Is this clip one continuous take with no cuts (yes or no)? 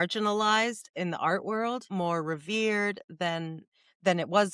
no